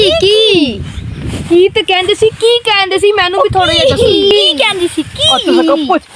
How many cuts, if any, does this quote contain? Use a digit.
0